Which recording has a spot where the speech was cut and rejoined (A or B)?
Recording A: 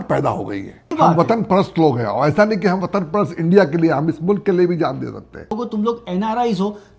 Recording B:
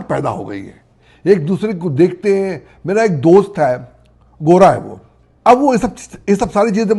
A